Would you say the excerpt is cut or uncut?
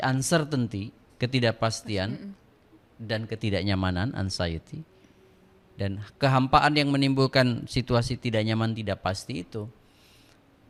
uncut